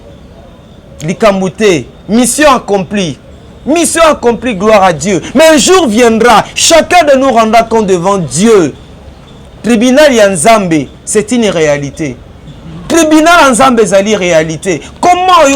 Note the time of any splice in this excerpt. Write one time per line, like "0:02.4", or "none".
none